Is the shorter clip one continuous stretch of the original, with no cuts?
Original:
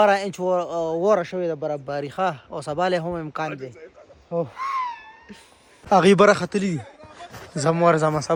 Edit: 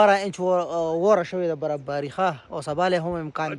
yes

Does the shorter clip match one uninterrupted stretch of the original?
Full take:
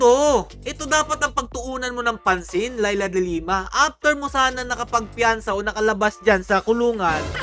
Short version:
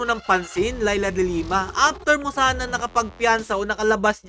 yes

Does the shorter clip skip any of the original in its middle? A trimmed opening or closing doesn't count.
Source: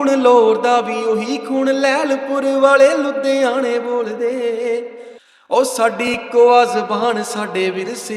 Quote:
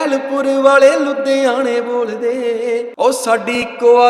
yes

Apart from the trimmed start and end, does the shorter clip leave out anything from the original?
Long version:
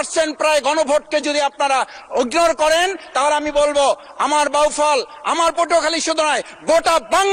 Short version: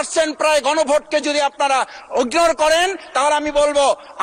no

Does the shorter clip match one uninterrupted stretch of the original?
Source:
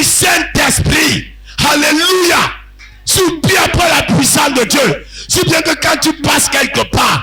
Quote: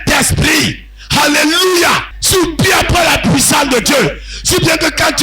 no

